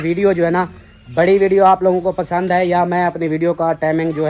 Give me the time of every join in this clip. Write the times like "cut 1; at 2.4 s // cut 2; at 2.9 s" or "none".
none